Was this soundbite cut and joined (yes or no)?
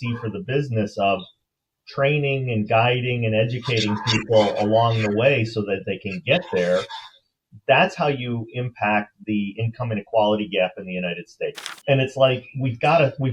yes